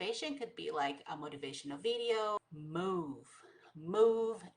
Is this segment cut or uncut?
cut